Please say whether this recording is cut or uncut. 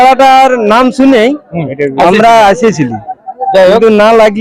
uncut